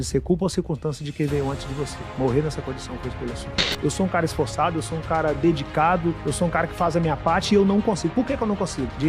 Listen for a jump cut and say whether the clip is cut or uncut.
cut